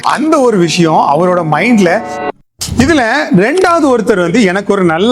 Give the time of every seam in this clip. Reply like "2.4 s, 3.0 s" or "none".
2.2 s